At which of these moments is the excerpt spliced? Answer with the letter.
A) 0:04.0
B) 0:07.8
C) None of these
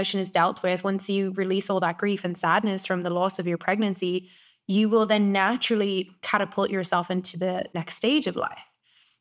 B